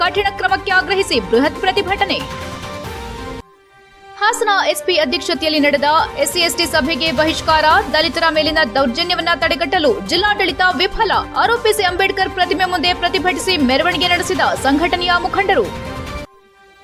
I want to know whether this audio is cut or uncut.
uncut